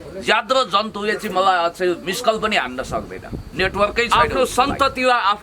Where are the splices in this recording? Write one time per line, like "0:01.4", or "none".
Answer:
0:04.1

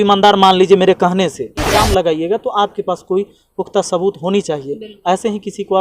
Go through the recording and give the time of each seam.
0:01.8

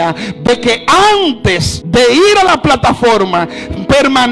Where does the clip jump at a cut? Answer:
0:01.7

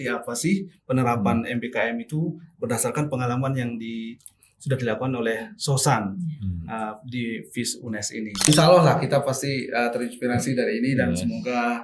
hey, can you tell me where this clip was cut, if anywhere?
0:08.5

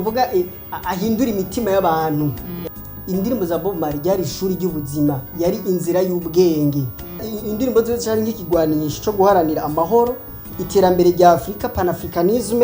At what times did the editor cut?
0:02.5
0:07.3

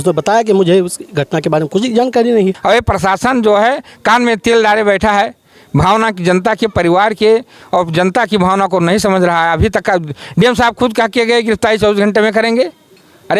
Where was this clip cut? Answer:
0:02.6

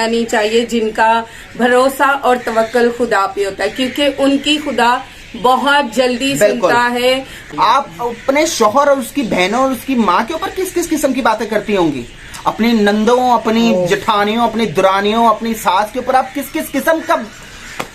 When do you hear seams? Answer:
0:07.4

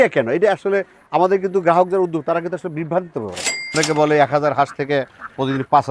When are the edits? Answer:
0:03.8

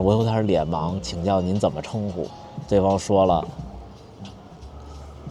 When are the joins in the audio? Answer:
none

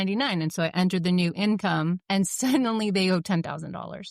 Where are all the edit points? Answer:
0:02.0

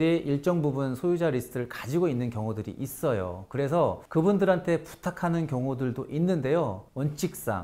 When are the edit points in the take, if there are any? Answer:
none

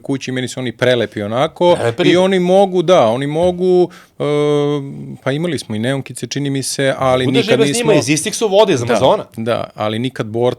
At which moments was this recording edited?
none

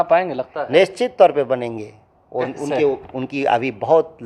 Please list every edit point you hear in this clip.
none

